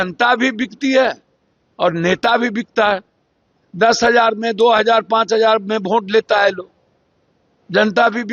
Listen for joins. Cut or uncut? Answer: uncut